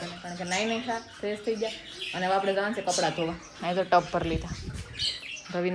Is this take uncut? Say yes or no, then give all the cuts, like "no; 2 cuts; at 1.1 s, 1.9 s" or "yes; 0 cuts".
yes; 0 cuts